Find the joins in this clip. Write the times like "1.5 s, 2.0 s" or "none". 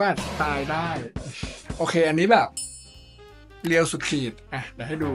none